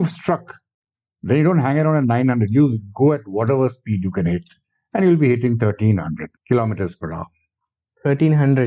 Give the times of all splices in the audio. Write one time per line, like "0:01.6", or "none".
0:06.3